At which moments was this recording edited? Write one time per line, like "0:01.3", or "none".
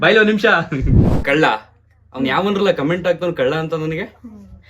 0:01.1